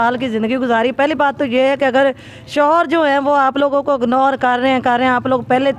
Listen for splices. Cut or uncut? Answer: uncut